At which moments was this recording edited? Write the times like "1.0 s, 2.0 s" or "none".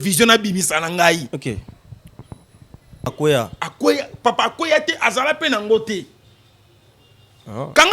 3.1 s